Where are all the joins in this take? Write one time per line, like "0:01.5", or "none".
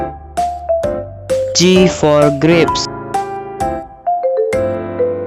0:01.0
0:02.7